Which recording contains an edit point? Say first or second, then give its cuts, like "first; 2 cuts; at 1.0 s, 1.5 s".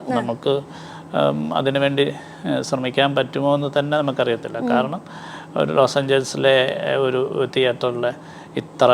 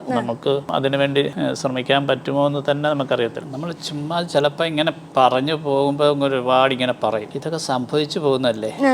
second; 3 cuts; at 1.1 s, 3.4 s, 7.3 s